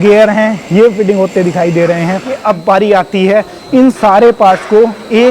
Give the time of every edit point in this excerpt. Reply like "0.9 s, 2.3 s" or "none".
2.4 s